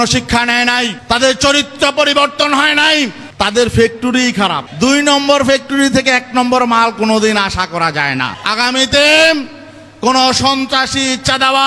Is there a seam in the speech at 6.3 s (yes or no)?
no